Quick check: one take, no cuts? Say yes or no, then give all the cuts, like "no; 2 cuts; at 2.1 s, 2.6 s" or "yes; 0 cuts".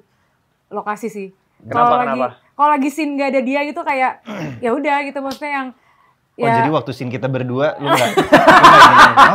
yes; 0 cuts